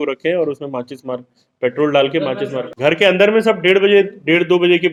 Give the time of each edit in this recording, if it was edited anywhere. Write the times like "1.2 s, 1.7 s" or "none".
none